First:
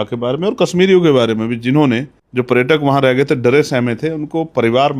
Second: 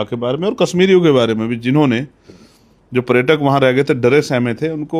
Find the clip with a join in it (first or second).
first